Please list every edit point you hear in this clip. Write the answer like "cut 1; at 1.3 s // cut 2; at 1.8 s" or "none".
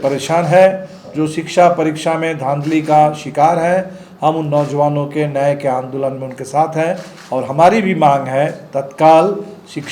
none